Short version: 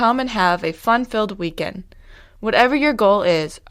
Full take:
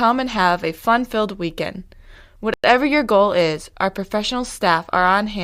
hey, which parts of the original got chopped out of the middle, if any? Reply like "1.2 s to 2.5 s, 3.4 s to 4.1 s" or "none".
2.5 s to 2.6 s